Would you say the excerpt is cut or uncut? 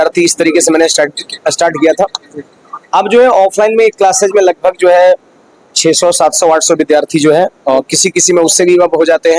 uncut